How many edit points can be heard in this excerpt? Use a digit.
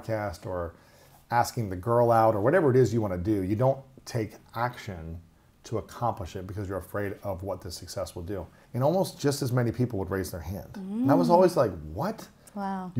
1